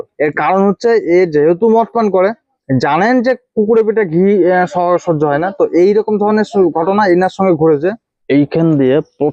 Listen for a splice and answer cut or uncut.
cut